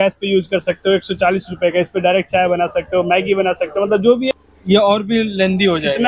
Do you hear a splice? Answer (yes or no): yes